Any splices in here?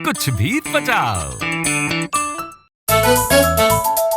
yes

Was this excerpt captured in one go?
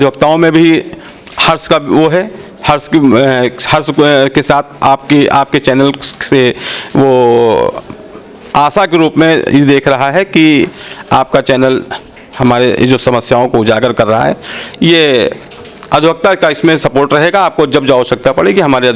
yes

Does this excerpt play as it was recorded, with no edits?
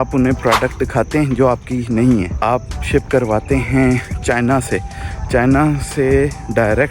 no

